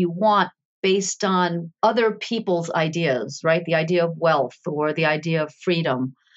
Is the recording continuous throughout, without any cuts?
no; 1 cut; at 1.7 s

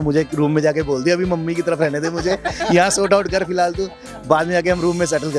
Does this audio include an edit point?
no; 0 cuts

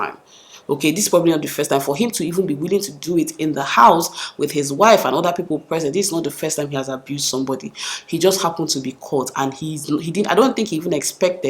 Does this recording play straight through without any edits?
yes; 0 cuts

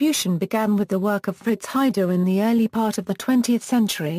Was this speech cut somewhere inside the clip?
yes; 1 cut; at 1.9 s

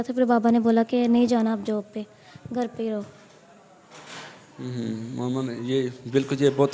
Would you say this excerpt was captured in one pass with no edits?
yes; 0 cuts

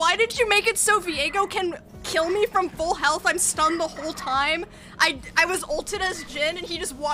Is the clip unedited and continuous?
yes; 0 cuts

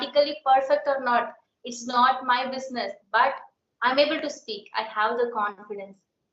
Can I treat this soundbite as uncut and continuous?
yes; 0 cuts

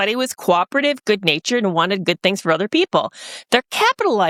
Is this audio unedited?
yes; 0 cuts

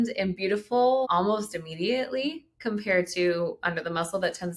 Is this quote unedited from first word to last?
yes; 0 cuts

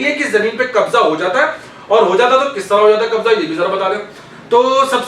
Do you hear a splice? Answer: no; 0 cuts

